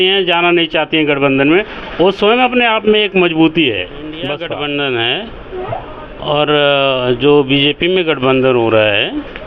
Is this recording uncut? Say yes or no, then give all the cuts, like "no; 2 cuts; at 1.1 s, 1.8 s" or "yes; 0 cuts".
no; 1 cut; at 4.4 s